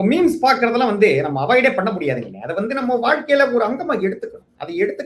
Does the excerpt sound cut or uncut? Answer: uncut